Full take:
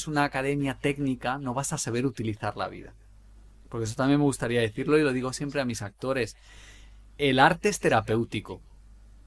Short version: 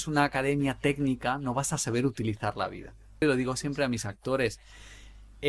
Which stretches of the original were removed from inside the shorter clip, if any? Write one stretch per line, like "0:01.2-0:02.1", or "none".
0:03.2-0:05.0